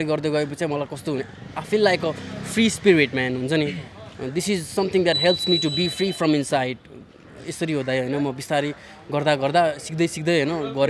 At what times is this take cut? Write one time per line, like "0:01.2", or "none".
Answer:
none